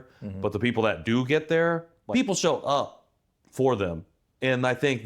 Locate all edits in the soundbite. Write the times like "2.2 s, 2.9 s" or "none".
1.9 s